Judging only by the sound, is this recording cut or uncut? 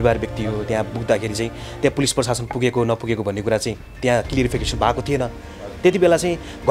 uncut